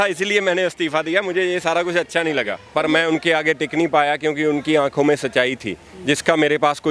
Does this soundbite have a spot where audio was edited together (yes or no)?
yes